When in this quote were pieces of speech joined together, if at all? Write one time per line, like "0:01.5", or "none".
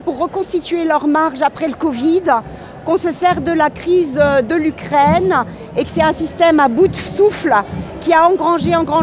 none